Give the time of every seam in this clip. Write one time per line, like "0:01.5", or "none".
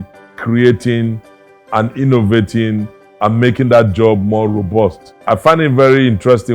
0:05.1